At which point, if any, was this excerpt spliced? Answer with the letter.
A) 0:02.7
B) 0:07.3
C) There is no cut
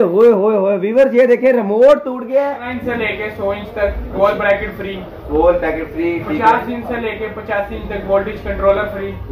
A